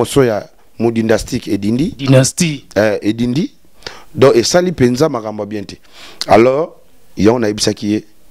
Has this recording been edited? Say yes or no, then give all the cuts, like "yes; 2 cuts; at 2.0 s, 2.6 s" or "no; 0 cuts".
no; 0 cuts